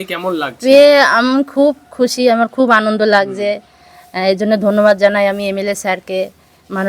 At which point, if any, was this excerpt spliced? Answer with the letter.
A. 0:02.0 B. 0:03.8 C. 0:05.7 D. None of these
D